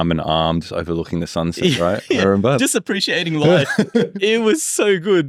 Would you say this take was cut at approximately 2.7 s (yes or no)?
no